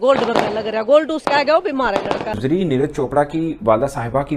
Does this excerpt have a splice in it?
yes; 1 cut; at 2.3 s

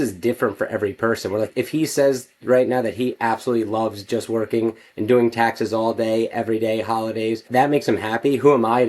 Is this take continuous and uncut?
no; 2 cuts; at 1.5 s, 7.5 s

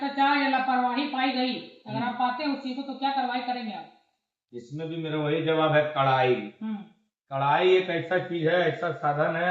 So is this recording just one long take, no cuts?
yes; 0 cuts

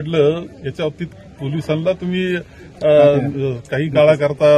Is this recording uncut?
yes; 0 cuts

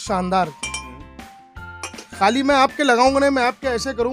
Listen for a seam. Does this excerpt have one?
no; 0 cuts

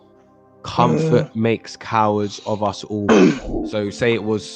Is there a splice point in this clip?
yes; 1 cut; at 3.5 s

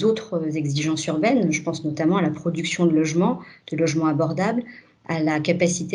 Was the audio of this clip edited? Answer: no; 0 cuts

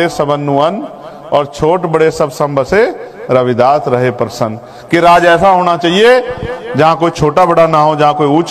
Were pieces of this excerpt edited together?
no; 0 cuts

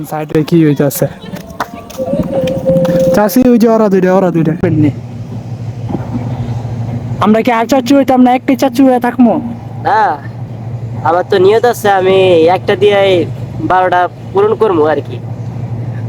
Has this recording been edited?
yes; 1 cut; at 4.6 s

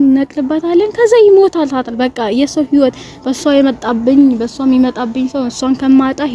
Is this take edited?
no; 0 cuts

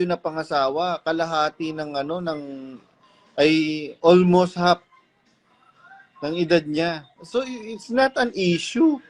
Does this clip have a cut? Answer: no; 0 cuts

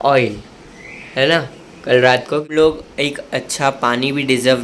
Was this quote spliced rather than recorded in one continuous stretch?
yes; 1 cut; at 2.5 s

